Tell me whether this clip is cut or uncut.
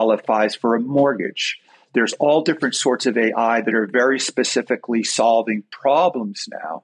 uncut